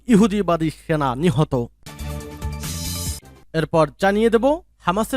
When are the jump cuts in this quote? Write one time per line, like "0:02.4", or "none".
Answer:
0:01.8
0:03.4